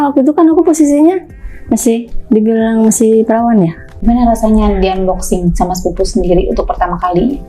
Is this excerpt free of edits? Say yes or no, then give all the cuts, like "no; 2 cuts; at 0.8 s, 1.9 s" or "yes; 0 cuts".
no; 1 cut; at 3.9 s